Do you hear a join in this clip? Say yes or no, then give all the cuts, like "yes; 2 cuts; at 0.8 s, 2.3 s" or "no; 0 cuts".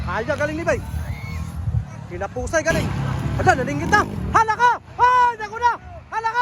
yes; 1 cut; at 2.9 s